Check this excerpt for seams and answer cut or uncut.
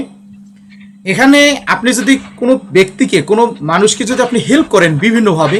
uncut